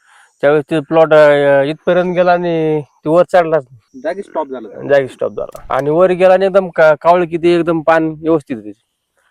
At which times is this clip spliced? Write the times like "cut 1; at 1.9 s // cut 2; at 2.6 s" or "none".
cut 1; at 3.8 s // cut 2; at 5.6 s